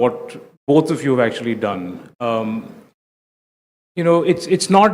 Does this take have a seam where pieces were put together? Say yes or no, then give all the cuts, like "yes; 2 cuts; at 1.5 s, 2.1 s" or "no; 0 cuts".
yes; 1 cut; at 1.4 s